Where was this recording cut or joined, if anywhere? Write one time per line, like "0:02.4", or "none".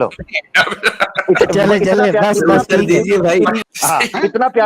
0:03.6

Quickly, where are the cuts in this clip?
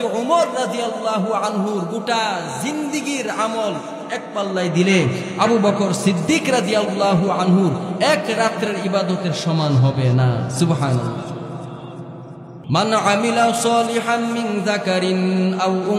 0:12.5

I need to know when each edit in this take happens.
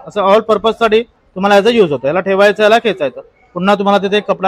none

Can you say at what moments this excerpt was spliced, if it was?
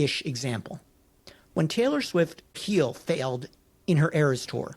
0:02.6

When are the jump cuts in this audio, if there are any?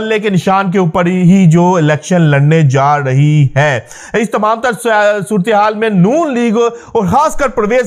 none

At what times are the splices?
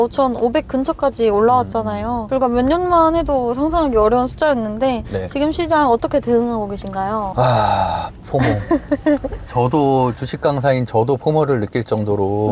none

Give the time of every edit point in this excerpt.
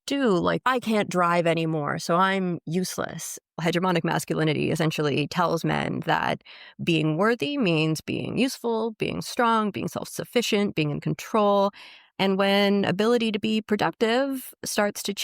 0:03.4

